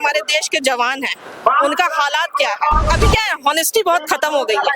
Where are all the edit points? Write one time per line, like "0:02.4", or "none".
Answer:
0:02.8

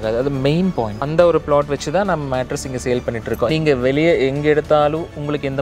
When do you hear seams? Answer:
0:03.5

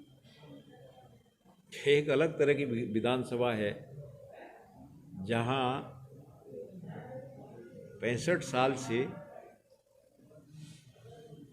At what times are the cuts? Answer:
none

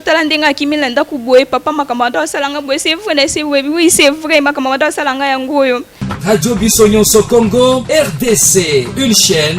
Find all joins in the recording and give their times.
0:06.0

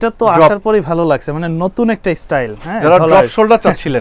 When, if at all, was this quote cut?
none

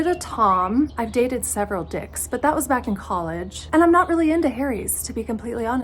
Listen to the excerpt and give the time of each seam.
none

